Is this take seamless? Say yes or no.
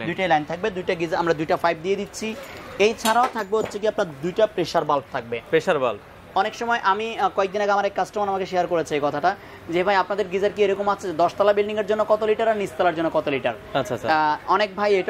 yes